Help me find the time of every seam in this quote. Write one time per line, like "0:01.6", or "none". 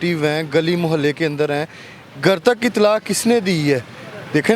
none